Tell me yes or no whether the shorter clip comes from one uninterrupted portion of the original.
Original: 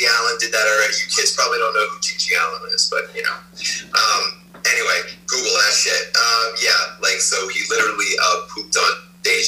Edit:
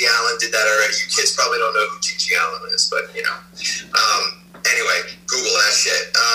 yes